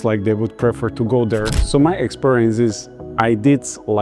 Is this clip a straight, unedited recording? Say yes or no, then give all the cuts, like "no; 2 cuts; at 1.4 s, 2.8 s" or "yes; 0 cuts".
no; 1 cut; at 1.6 s